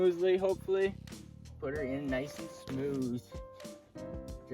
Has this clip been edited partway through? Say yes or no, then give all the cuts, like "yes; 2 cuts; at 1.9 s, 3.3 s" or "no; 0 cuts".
yes; 1 cut; at 1.3 s